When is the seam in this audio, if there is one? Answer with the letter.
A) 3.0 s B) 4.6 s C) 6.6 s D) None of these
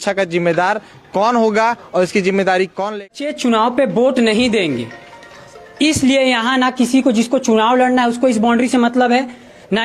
A